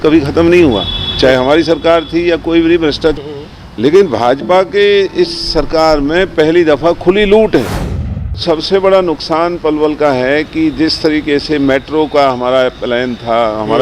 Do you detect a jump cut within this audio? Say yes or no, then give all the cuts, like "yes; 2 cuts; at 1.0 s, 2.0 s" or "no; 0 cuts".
yes; 2 cuts; at 3.1 s, 8.4 s